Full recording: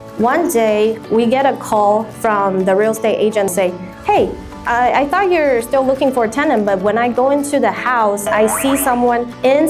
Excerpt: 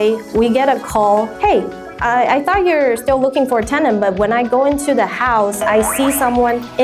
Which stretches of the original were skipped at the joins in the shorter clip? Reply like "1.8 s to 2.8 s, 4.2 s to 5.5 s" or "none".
2.1 s to 4.0 s